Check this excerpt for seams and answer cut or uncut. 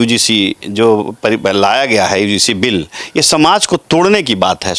uncut